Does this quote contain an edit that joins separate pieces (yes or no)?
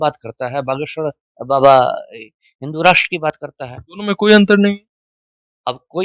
no